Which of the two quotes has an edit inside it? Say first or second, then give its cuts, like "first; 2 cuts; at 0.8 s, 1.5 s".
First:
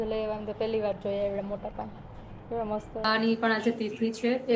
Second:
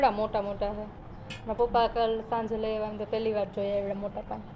first; 1 cut; at 3.1 s